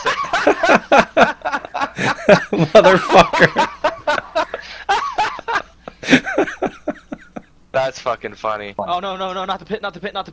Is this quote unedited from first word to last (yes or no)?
no